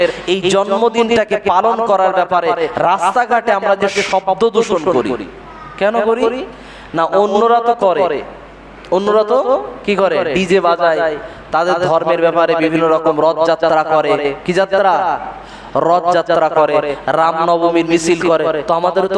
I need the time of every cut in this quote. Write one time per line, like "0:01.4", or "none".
none